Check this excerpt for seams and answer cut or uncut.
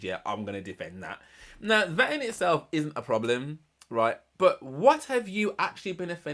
uncut